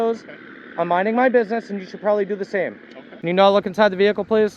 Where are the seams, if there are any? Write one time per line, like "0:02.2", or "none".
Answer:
0:03.4